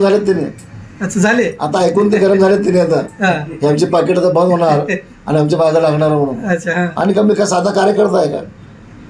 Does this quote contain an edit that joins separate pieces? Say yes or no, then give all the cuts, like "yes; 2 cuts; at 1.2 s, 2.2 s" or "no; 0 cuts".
no; 0 cuts